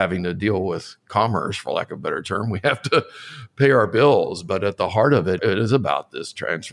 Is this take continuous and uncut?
no; 1 cut; at 5.4 s

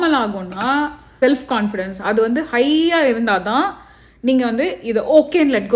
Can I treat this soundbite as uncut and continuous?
no; 1 cut; at 1.1 s

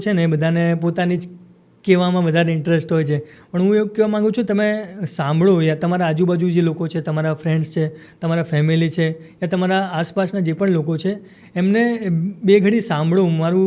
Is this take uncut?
yes; 0 cuts

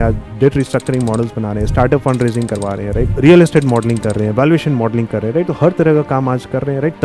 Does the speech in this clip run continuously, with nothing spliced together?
yes; 0 cuts

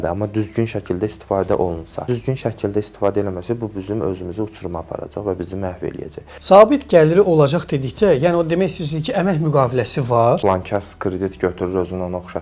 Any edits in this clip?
yes; 3 cuts; at 2.1 s, 6.3 s, 10.4 s

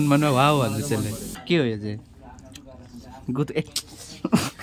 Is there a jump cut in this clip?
yes; 1 cut; at 1.3 s

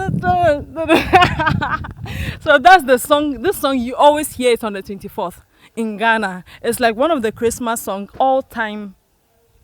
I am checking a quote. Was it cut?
no; 0 cuts

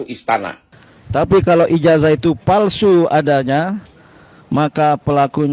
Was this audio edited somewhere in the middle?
yes; 1 cut; at 0.9 s

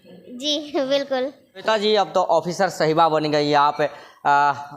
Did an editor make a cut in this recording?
yes; 1 cut; at 1.6 s

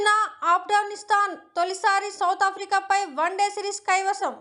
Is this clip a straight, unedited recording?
yes; 0 cuts

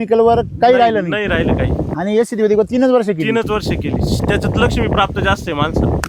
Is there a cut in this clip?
no; 0 cuts

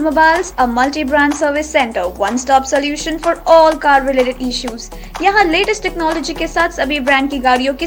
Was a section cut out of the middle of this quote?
no; 0 cuts

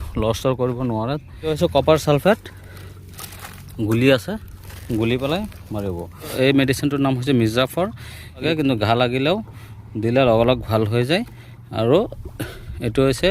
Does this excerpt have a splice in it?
yes; 2 cuts; at 1.5 s, 8.4 s

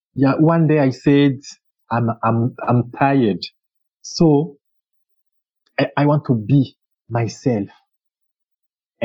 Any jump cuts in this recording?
no; 0 cuts

